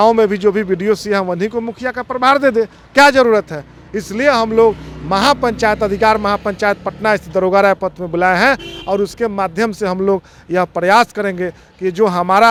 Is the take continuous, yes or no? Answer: yes